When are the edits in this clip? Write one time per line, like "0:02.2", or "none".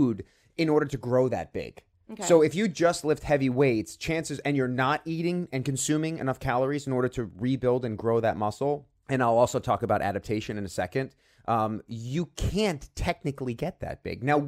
none